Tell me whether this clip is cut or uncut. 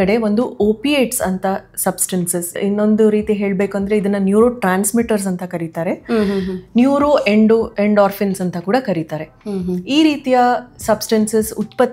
cut